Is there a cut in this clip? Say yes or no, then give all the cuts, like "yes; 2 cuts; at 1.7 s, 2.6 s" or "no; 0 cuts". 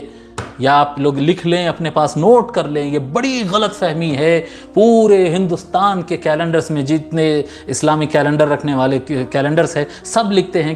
no; 0 cuts